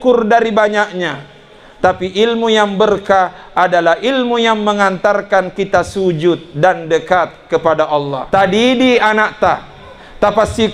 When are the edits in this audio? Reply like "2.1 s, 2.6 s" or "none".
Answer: 8.2 s